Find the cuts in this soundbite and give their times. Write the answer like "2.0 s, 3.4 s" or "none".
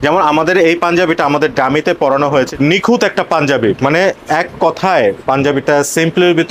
2.5 s